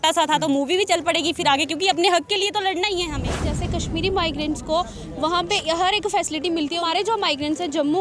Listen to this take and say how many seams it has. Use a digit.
2